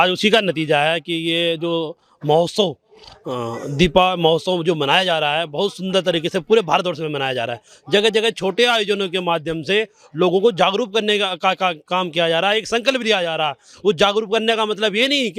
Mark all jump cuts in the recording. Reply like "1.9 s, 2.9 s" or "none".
none